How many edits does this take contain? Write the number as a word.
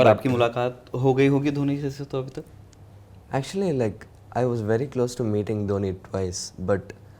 zero